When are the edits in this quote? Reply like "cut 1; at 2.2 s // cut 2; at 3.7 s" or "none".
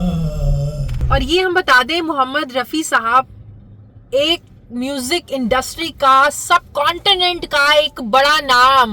cut 1; at 1.0 s